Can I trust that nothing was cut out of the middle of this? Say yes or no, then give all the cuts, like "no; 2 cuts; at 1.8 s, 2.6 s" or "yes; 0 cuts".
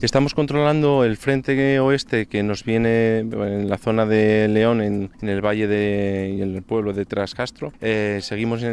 no; 2 cuts; at 5.1 s, 7.7 s